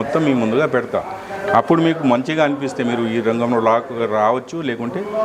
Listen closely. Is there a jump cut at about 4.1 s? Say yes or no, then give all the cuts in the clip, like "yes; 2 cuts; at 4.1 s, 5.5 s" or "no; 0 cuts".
no; 0 cuts